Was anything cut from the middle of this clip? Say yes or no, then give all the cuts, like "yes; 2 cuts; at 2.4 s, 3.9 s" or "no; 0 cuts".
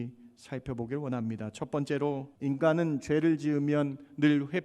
yes; 1 cut; at 2.3 s